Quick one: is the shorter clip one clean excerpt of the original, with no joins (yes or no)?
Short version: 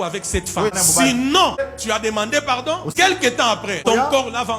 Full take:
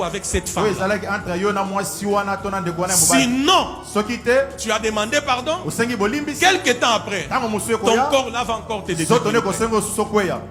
no